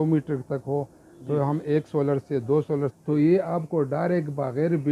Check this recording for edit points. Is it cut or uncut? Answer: cut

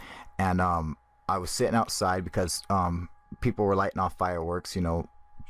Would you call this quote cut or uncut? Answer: uncut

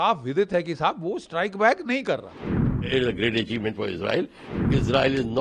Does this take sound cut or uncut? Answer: cut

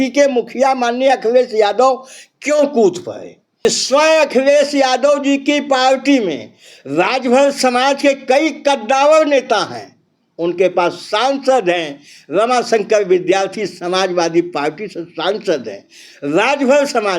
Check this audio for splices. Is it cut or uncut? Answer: cut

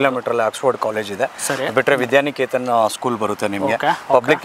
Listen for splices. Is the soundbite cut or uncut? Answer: uncut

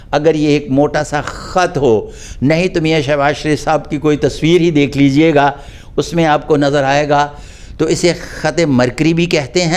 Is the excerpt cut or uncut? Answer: uncut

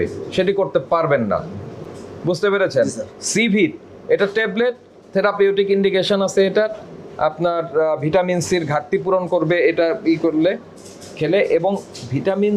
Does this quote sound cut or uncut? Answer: uncut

